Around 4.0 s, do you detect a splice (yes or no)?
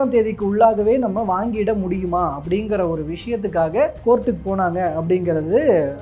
yes